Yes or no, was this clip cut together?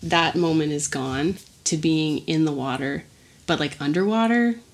yes